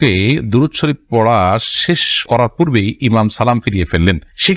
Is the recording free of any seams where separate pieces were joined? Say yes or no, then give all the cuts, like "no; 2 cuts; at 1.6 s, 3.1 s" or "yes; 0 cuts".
yes; 0 cuts